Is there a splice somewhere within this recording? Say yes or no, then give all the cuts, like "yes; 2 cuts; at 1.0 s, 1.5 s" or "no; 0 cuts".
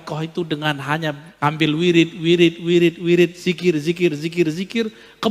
yes; 1 cut; at 1.3 s